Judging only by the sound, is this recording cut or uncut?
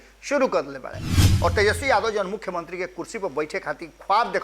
cut